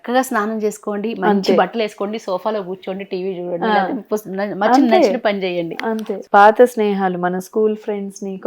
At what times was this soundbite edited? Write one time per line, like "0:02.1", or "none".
0:06.1